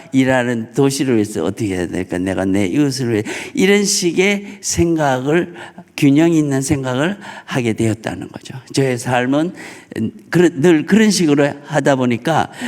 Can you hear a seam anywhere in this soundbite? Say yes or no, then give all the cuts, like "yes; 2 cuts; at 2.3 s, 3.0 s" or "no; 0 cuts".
no; 0 cuts